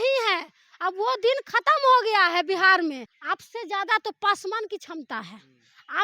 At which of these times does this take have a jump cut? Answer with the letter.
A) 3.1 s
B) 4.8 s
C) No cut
A